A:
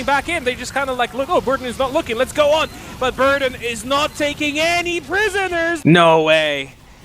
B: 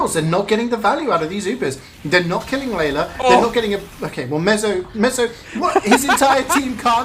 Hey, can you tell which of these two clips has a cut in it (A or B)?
A